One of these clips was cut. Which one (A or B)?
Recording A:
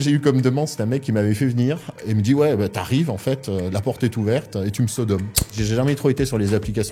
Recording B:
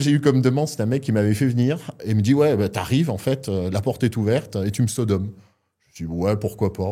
A